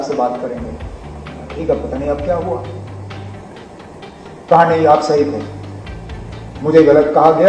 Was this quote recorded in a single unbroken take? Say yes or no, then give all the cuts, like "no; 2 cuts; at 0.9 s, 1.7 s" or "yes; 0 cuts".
yes; 0 cuts